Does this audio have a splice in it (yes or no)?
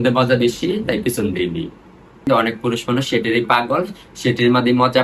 yes